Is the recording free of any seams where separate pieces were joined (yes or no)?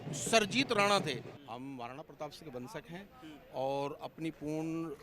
no